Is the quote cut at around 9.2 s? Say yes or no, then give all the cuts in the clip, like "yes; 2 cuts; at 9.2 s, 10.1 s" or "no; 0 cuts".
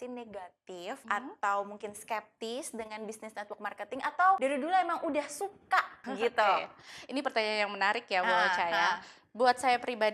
no; 3 cuts; at 1.0 s, 4.4 s, 6.0 s